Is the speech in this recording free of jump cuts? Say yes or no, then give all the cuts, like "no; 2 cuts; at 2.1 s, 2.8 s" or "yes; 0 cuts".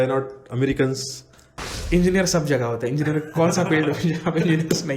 no; 1 cut; at 1.7 s